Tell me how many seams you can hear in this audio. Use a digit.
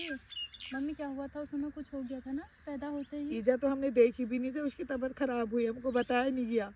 0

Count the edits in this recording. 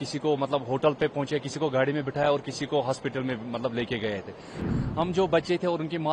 1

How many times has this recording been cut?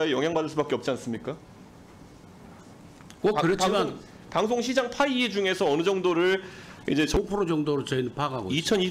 1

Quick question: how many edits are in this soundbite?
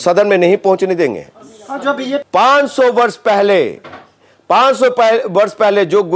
1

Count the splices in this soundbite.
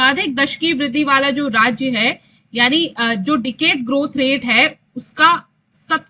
0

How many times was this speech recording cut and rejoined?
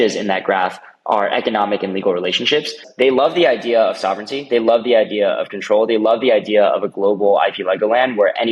1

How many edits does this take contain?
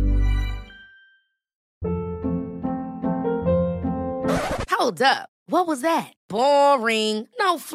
1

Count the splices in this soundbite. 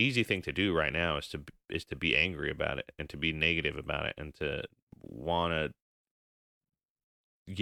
0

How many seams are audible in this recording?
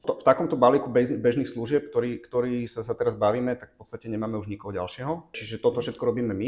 1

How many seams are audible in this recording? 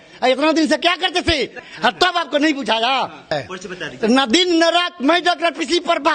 2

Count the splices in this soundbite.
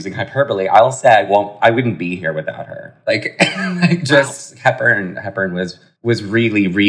0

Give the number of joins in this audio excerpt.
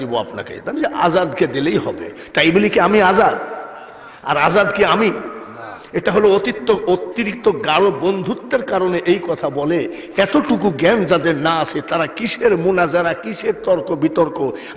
0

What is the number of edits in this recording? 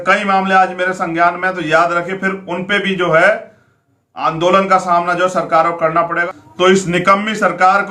1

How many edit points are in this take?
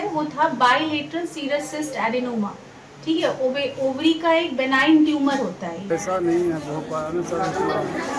1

